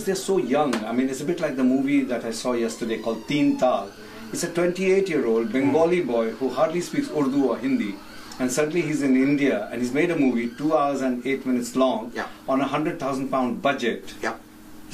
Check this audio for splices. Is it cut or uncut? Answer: cut